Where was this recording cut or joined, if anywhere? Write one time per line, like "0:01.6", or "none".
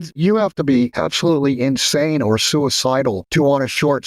0:00.9
0:03.2